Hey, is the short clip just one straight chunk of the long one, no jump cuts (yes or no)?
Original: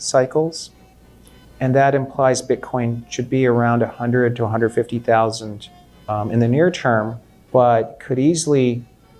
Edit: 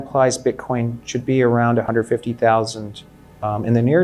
no